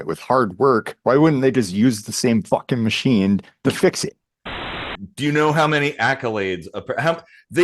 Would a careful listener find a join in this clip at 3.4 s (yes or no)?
no